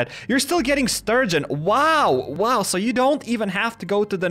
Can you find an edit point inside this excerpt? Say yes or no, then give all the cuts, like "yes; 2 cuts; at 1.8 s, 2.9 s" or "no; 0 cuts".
yes; 1 cut; at 2.3 s